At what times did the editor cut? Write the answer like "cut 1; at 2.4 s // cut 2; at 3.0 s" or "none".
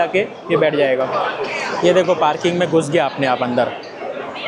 none